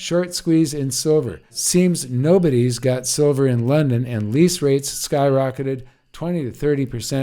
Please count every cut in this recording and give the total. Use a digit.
1